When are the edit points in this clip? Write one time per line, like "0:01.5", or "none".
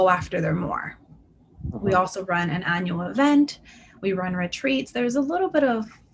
none